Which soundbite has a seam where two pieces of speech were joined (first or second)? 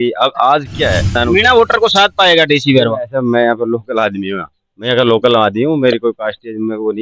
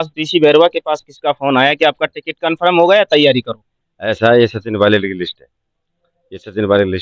first